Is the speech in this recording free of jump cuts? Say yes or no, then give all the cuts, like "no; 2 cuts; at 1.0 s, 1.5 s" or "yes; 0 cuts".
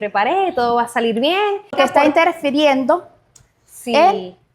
no; 1 cut; at 1.7 s